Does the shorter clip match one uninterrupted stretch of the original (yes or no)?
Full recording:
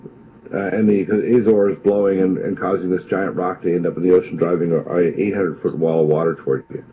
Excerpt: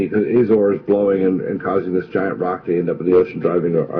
yes